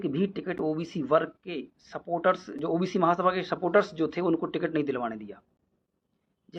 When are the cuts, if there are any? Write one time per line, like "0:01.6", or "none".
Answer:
none